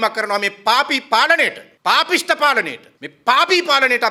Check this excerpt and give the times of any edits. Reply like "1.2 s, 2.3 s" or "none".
none